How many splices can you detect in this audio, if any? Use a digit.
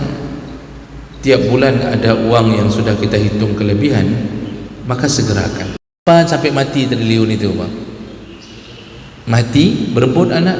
1